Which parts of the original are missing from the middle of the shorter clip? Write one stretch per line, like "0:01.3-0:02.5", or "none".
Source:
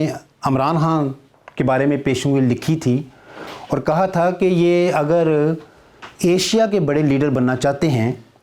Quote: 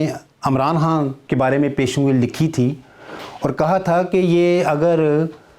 0:01.2-0:01.5